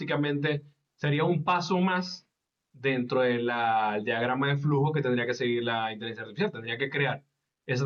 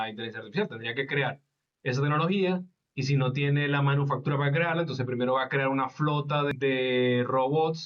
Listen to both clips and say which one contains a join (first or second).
second